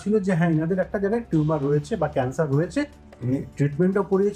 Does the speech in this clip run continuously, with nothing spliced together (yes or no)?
yes